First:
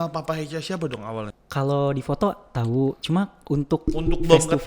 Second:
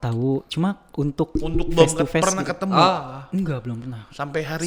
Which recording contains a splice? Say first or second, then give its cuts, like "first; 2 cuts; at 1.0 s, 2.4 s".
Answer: first; 1 cut; at 1.4 s